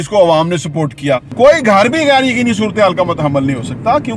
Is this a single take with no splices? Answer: no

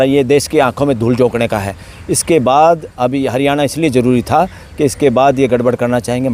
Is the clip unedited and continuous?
yes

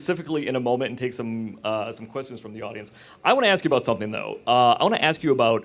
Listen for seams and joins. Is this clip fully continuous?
yes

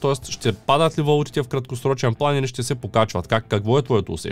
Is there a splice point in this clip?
no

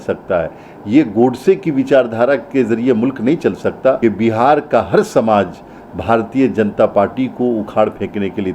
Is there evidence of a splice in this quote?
yes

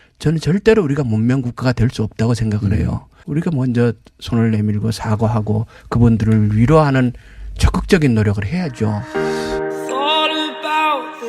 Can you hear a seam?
yes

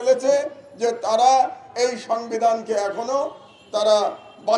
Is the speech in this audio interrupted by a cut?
no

